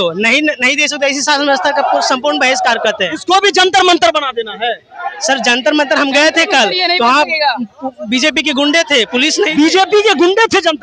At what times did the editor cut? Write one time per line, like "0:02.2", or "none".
none